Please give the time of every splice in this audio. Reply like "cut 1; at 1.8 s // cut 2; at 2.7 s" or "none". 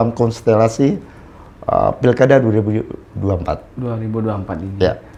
none